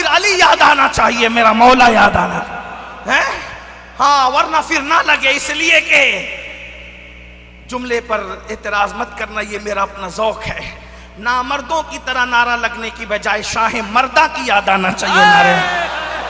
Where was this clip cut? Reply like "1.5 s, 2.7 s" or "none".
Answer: none

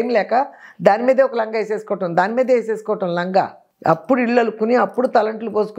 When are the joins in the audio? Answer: 3.6 s

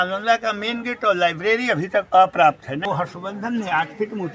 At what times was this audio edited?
2.9 s

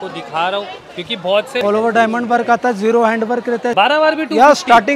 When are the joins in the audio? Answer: 1.6 s, 3.7 s

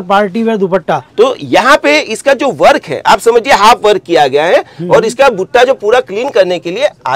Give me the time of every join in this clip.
1.0 s

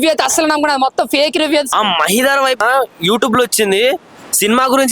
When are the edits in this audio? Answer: 1.7 s, 2.6 s

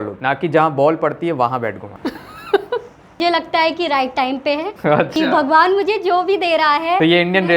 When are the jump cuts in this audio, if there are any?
3.2 s

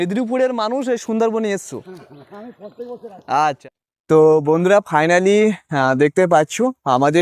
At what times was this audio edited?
3.6 s

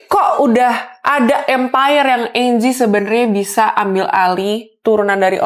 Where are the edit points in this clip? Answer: none

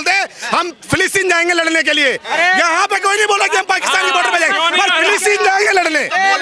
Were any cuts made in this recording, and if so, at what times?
none

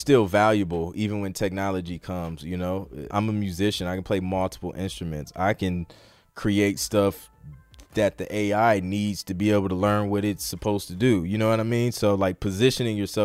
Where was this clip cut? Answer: 3.0 s

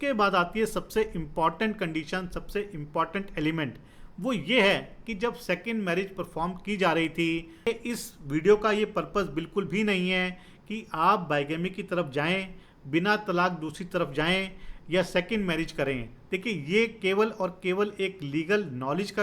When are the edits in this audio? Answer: 7.7 s

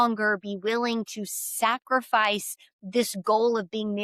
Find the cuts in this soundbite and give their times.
none

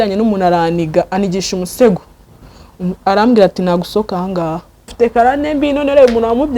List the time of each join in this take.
4.9 s

